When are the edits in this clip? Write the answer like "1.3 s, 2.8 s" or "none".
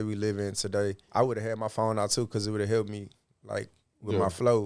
1.0 s